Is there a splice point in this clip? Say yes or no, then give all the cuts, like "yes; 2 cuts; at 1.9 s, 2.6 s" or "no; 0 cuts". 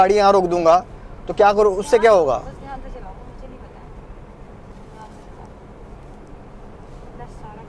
no; 0 cuts